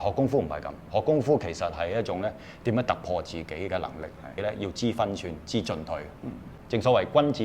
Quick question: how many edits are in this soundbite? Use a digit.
2